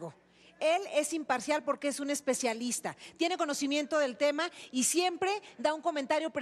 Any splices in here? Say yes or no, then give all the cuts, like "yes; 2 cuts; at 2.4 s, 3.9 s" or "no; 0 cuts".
yes; 1 cut; at 5.1 s